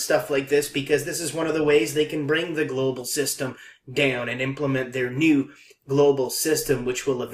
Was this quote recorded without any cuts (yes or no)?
yes